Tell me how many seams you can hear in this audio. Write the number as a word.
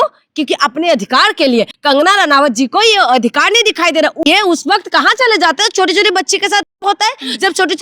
two